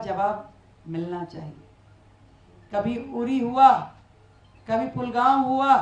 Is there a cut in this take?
no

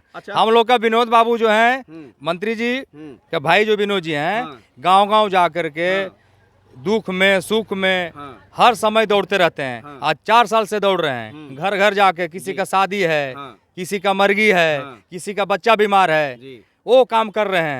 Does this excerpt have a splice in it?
no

